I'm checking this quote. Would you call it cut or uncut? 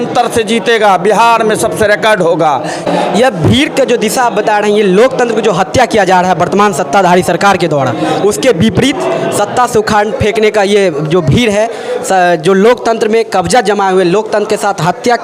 uncut